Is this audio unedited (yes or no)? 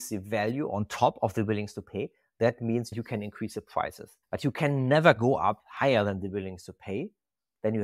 no